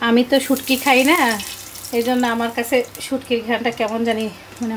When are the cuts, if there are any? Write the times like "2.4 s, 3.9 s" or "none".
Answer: none